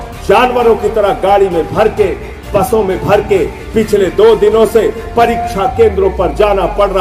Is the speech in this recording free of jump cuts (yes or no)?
yes